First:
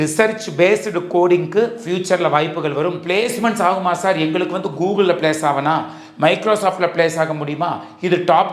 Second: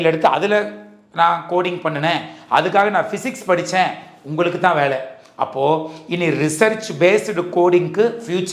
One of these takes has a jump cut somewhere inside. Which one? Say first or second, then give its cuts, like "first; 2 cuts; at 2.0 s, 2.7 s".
first; 1 cut; at 3.0 s